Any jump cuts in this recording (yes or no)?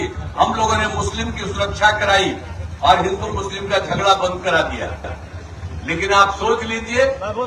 no